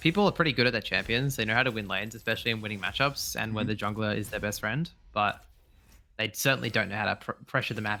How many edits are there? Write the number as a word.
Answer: zero